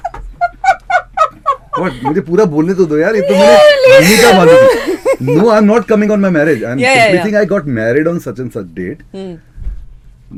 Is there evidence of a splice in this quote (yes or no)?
no